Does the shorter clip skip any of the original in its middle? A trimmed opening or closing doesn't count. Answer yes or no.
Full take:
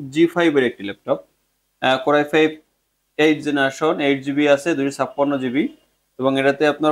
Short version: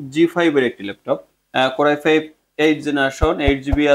yes